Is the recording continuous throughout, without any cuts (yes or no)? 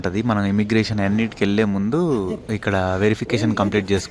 no